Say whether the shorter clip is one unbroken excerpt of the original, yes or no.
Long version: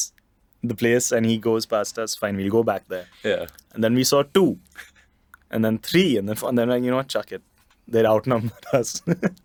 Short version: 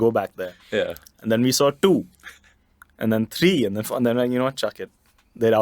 yes